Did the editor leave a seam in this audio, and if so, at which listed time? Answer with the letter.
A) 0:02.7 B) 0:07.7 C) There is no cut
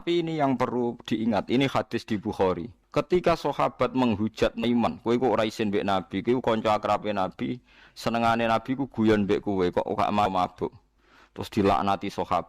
A